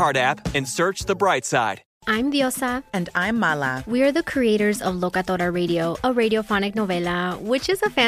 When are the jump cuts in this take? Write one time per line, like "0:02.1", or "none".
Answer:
0:01.9